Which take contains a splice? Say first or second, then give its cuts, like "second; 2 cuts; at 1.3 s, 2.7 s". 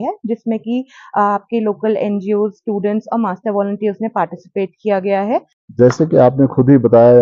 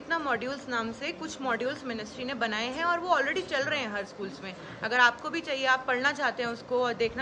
first; 1 cut; at 5.6 s